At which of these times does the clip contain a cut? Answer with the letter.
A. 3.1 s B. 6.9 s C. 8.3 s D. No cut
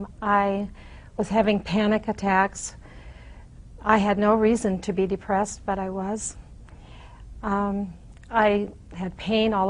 D